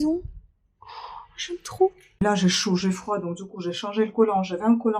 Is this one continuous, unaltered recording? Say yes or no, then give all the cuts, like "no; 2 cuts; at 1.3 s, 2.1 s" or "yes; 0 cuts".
no; 1 cut; at 2.2 s